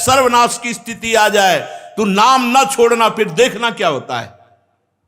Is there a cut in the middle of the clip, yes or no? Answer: no